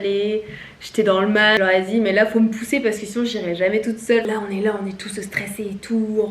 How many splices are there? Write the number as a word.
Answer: two